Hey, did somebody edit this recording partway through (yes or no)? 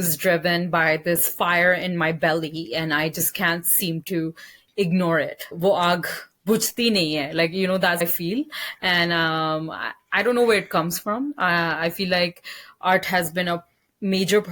no